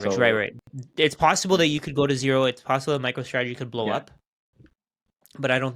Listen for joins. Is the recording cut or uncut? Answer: uncut